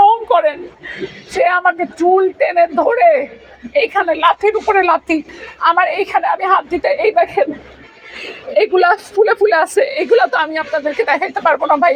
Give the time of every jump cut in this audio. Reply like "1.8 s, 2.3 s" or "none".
none